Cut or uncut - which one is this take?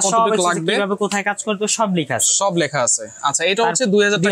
uncut